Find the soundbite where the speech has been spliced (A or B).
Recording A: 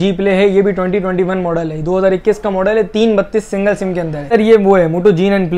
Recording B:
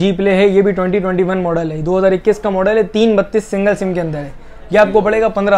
A